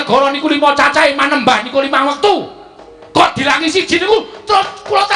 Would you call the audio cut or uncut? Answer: uncut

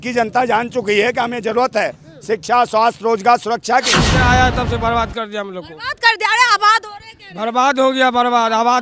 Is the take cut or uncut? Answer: cut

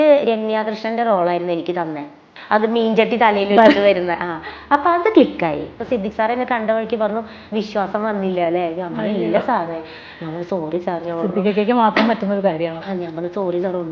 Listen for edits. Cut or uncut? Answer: cut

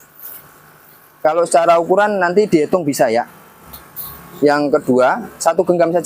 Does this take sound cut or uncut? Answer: uncut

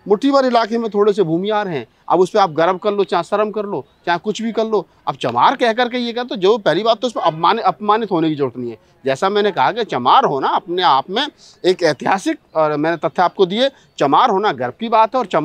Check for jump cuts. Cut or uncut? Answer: uncut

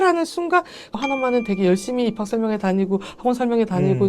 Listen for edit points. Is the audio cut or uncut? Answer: cut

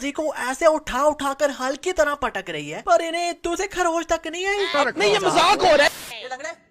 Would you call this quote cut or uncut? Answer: cut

